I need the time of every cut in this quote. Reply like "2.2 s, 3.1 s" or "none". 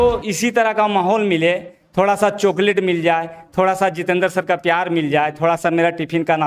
none